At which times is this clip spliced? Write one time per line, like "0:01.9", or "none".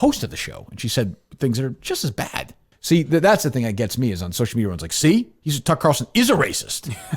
0:02.7